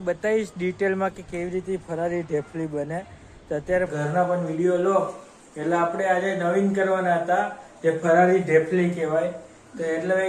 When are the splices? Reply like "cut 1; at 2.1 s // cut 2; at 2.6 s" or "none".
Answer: cut 1; at 3.9 s